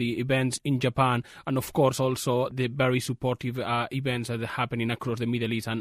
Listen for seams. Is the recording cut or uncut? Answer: uncut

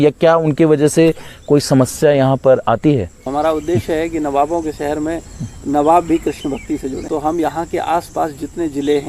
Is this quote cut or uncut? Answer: cut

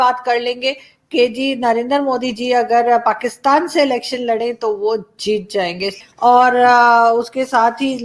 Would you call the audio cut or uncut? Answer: uncut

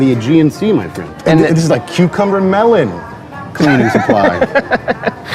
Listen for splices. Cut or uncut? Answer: cut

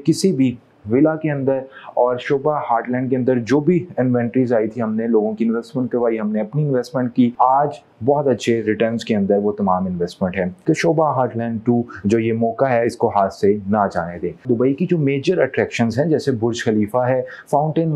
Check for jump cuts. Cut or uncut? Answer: cut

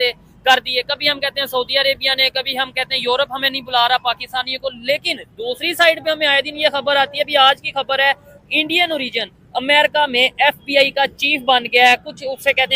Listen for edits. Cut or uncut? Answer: uncut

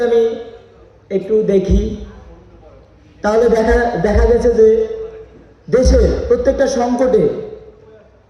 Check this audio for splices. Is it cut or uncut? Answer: uncut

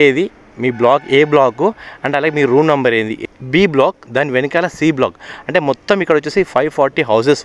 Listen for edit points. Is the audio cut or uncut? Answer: cut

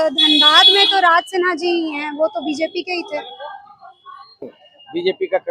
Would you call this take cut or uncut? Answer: cut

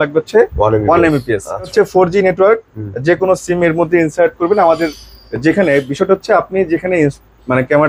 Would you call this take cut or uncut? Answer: cut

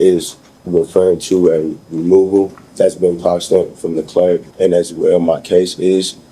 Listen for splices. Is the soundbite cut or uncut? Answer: cut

